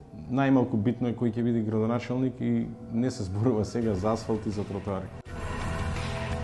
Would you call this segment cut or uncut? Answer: cut